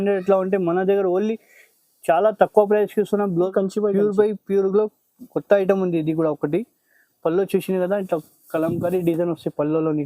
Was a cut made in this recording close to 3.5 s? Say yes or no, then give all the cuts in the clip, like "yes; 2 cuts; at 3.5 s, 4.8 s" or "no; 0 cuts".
yes; 1 cut; at 3.5 s